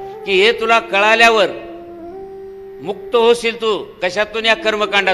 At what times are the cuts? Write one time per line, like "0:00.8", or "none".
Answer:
none